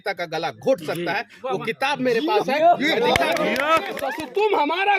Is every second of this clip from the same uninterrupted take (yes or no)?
no